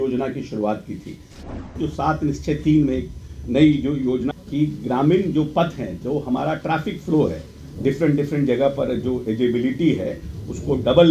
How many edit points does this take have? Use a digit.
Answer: 3